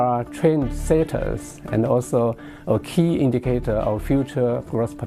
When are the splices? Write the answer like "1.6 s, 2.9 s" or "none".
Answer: none